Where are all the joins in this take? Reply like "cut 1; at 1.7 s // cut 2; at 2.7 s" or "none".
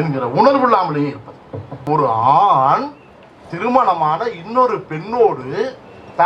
cut 1; at 1.9 s